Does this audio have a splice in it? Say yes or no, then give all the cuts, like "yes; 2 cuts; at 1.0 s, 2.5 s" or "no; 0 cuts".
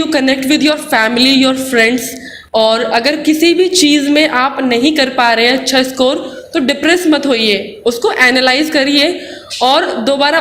no; 0 cuts